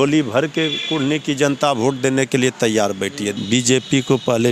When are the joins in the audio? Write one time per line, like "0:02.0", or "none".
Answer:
0:03.3